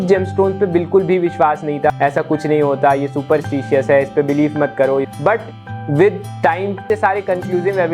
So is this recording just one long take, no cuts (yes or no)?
no